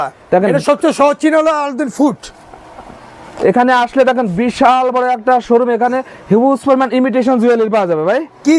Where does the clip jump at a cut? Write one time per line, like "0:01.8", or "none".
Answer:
none